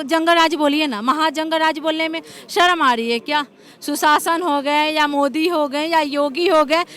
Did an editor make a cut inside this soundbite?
no; 0 cuts

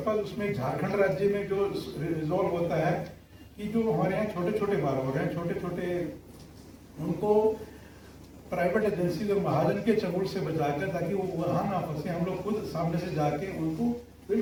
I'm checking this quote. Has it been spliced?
no; 0 cuts

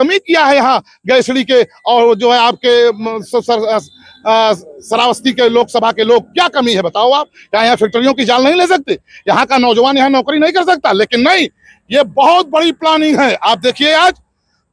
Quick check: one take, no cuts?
yes; 0 cuts

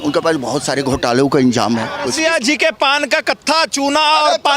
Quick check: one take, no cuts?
no; 1 cut; at 2.1 s

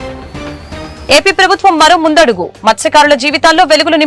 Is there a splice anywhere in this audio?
no; 0 cuts

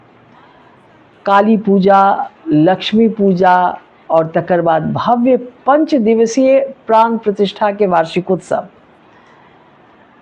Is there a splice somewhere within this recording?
no; 0 cuts

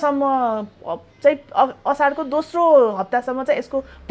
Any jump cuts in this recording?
no; 0 cuts

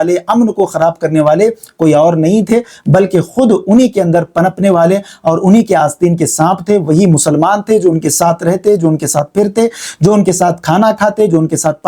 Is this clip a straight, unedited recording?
yes; 0 cuts

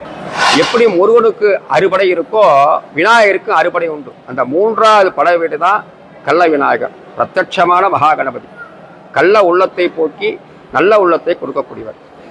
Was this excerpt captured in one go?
yes; 0 cuts

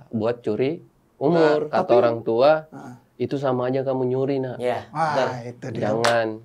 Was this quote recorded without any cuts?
no; 1 cut; at 1.7 s

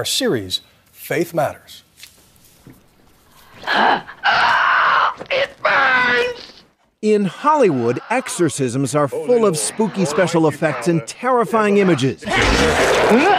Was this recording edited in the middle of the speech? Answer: no; 0 cuts

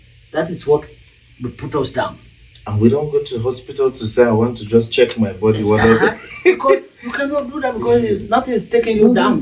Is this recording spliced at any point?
no; 0 cuts

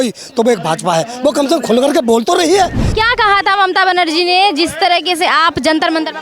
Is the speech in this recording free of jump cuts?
no; 1 cut; at 2.8 s

